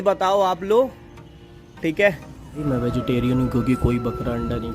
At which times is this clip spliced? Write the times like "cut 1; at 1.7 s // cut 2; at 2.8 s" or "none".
cut 1; at 2.6 s